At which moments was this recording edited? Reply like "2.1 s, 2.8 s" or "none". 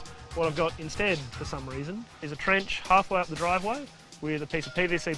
2.3 s